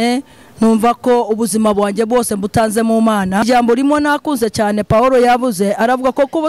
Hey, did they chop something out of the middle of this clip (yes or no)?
yes